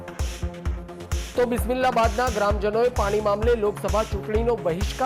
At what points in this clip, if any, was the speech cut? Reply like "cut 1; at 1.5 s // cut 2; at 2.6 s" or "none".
none